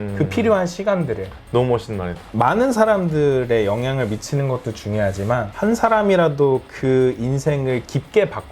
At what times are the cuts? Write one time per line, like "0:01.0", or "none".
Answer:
0:02.2